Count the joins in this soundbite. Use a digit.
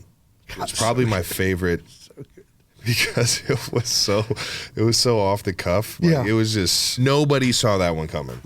1